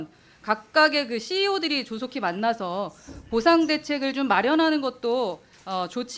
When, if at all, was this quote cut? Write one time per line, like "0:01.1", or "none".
none